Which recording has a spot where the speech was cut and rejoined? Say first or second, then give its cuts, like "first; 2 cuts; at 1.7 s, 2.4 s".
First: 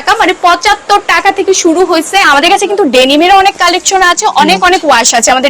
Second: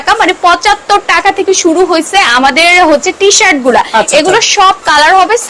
first; 1 cut; at 2.3 s